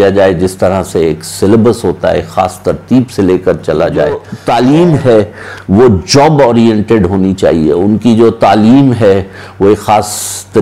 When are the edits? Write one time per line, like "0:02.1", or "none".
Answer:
0:04.3